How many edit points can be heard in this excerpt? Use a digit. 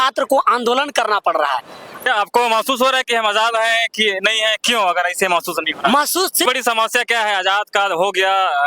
2